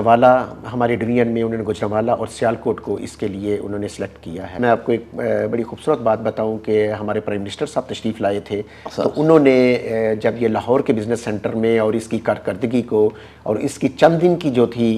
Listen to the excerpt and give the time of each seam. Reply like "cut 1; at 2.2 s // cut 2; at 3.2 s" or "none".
cut 1; at 4.6 s